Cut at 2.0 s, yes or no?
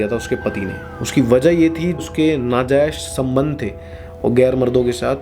yes